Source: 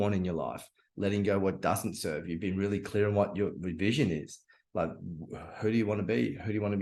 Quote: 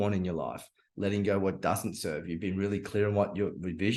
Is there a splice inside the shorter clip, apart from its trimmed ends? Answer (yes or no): no